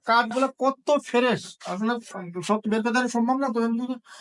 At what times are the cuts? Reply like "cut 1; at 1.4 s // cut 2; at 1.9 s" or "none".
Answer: none